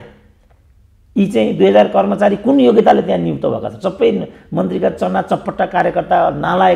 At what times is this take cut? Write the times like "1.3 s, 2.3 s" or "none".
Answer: none